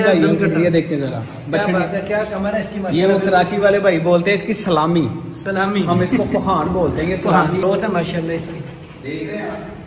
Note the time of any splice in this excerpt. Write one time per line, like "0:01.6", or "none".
0:07.6